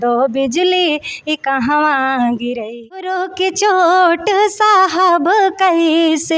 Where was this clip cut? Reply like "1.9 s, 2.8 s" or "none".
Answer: 2.9 s